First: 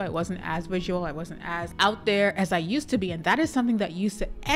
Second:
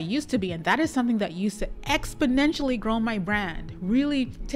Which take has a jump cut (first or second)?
first